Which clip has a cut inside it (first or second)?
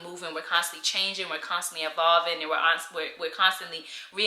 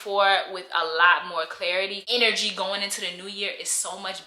second